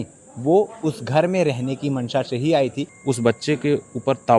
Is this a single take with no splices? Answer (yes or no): no